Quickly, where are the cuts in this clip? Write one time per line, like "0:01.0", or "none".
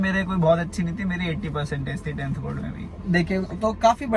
none